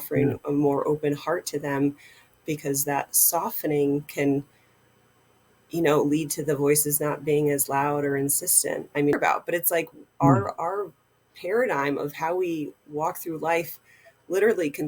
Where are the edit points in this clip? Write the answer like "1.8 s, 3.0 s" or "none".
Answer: 9.1 s